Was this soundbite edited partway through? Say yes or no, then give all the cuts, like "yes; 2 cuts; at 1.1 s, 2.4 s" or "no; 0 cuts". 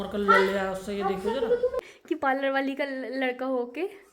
yes; 1 cut; at 1.8 s